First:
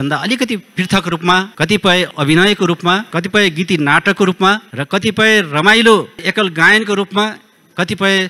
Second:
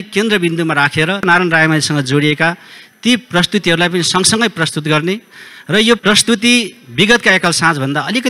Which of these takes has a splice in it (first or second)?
second